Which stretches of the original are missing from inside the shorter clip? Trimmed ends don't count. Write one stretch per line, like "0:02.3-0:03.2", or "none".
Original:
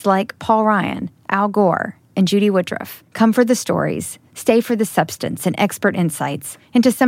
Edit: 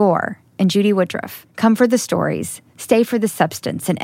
none

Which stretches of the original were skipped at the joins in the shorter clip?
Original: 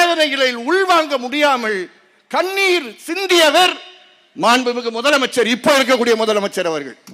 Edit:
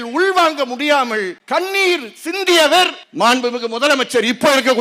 0:01.9-0:02.2
0:03.8-0:04.2

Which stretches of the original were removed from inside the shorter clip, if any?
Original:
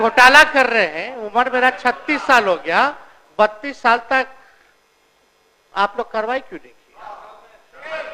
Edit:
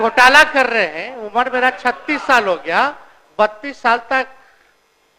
none

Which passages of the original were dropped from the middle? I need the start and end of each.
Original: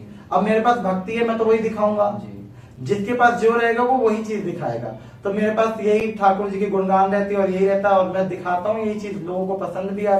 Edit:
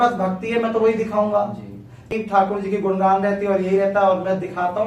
0:02.8-0:06.0

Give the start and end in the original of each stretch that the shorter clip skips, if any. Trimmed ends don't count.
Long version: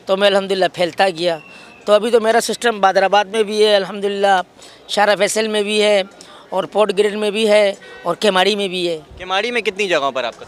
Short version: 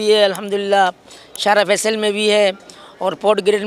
none

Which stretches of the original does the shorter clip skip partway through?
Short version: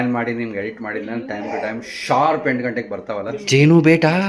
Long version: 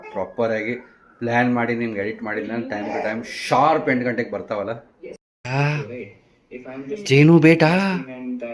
0:04.8-0:06.9

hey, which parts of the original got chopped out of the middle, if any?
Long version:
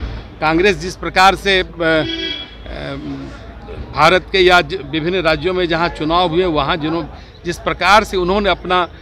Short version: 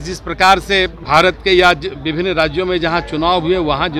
0:01.7-0:03.8

